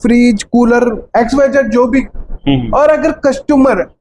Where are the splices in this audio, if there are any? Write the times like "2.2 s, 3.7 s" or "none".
none

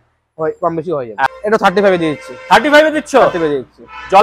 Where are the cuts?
1.2 s

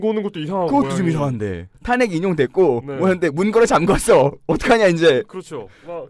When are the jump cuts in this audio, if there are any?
1.7 s

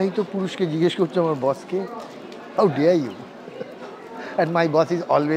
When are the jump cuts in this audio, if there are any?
none

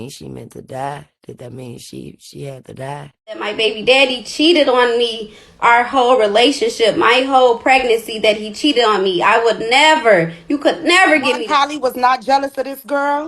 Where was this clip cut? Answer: 3.5 s, 11.4 s

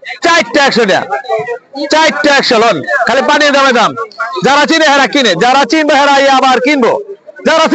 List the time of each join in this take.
none

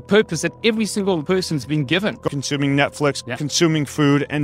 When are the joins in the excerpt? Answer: 1.2 s, 2.4 s, 3.3 s

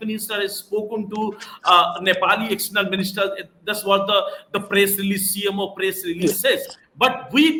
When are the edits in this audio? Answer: none

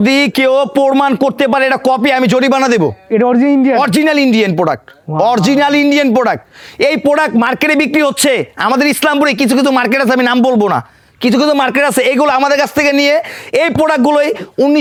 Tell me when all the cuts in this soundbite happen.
none

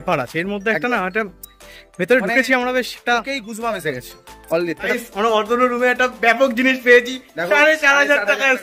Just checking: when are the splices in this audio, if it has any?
4.9 s

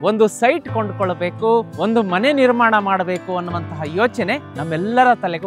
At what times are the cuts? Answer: 1.7 s, 4.5 s

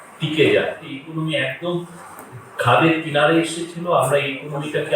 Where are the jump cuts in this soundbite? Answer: 0.9 s

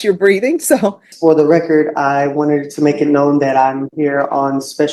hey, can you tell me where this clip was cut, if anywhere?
1.1 s

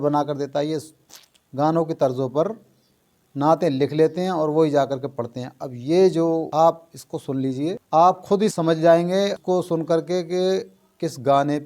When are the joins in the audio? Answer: 6.5 s, 7.8 s, 8.5 s, 9.4 s

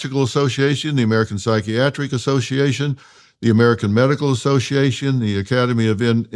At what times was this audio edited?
none

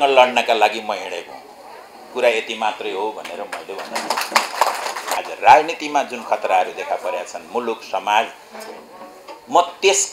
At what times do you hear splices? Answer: 5.2 s

